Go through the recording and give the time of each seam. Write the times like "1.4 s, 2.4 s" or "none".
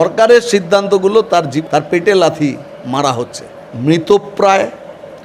1.6 s, 3.7 s